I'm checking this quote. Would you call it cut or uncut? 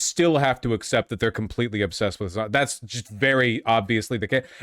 uncut